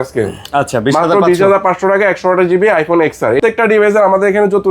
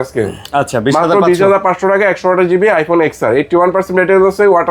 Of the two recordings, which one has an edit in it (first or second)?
first